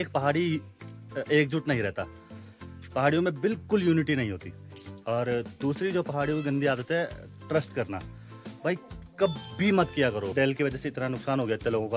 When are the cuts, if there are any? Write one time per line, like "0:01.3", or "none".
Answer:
0:10.3